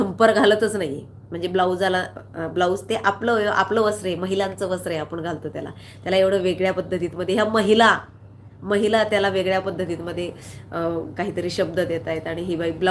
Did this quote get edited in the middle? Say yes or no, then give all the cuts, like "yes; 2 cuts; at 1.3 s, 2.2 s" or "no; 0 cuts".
no; 0 cuts